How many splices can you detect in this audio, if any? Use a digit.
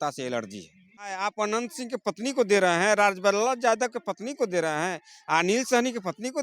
1